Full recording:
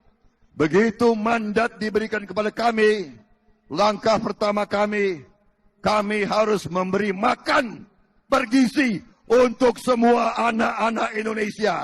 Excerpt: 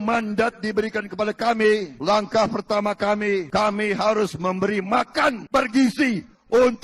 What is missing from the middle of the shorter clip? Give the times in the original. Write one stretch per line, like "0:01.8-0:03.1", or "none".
0:03.1-0:03.6
0:05.2-0:05.8
0:07.7-0:08.2